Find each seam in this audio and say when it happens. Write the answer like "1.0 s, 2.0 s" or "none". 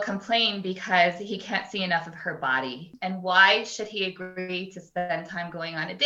3.0 s